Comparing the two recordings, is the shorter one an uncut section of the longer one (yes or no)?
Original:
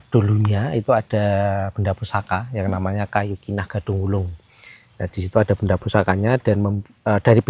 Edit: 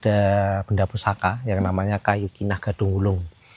yes